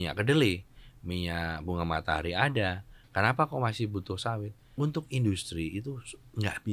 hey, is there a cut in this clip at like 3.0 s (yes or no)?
no